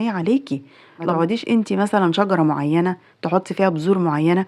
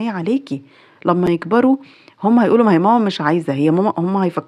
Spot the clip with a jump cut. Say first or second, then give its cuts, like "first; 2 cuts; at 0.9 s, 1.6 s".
first; 1 cut; at 1.1 s